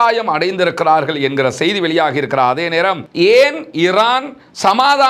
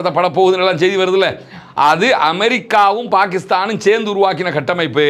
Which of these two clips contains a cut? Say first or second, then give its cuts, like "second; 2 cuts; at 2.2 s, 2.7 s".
first; 1 cut; at 3.0 s